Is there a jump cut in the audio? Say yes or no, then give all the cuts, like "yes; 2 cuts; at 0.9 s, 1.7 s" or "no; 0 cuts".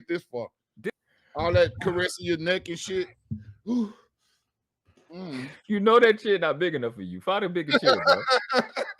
yes; 1 cut; at 0.9 s